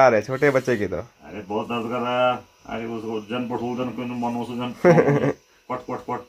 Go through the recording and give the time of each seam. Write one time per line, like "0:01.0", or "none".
none